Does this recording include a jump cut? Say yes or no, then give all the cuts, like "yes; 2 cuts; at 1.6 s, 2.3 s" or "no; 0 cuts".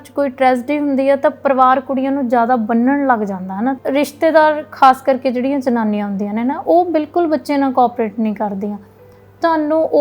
yes; 1 cut; at 3.8 s